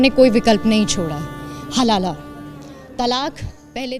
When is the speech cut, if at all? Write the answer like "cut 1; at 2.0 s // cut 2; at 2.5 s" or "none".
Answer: none